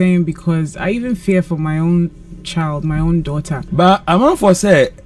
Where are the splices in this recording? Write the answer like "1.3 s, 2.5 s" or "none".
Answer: 3.6 s